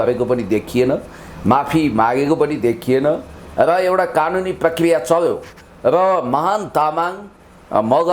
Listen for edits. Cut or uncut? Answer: uncut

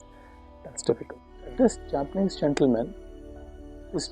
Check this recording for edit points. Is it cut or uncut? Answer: cut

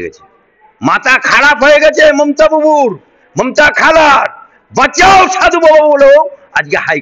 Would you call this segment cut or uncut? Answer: uncut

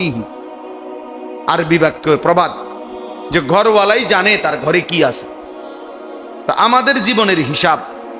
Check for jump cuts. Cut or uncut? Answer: uncut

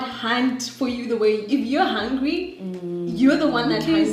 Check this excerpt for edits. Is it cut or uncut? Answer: uncut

